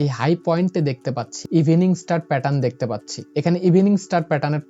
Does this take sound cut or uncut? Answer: cut